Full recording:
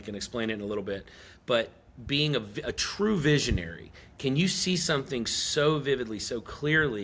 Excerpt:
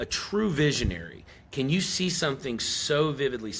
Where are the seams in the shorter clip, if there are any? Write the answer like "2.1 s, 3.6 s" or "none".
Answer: none